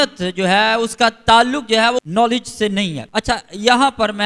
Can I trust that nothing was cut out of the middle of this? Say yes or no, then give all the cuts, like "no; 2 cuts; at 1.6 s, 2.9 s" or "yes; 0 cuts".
yes; 0 cuts